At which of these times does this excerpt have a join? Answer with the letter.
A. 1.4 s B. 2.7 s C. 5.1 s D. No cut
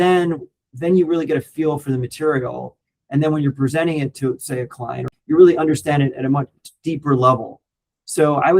C